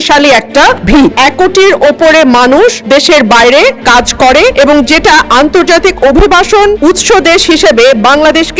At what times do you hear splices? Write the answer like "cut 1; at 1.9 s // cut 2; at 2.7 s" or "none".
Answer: cut 1; at 1.2 s // cut 2; at 2.8 s // cut 3; at 4.3 s // cut 4; at 6.8 s